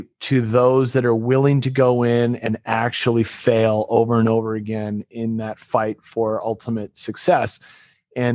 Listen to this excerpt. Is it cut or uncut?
uncut